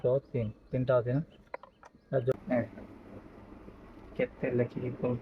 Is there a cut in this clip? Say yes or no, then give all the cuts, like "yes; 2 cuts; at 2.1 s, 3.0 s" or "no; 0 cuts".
yes; 1 cut; at 2.3 s